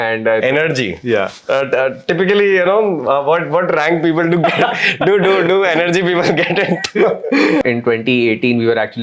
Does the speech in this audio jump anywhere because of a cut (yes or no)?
yes